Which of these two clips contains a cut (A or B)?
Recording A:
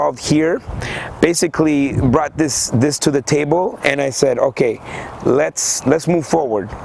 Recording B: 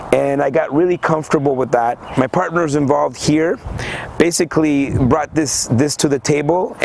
B